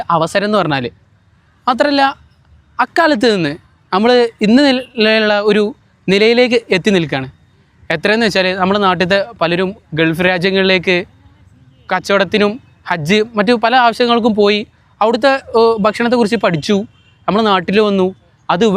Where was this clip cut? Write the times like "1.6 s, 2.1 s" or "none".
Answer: none